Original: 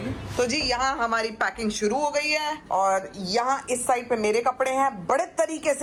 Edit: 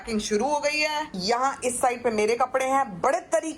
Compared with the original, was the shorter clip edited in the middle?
yes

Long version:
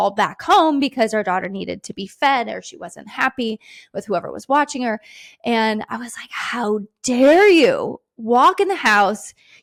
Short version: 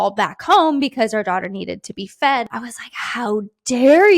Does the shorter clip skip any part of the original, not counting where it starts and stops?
yes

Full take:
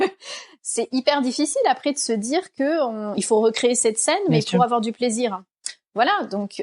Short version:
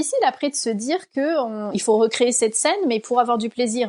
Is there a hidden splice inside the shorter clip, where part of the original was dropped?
no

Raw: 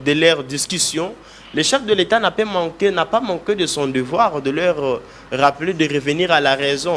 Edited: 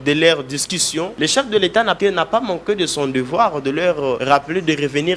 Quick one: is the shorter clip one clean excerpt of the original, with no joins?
no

